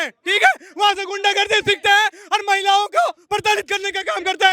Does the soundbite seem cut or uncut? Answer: uncut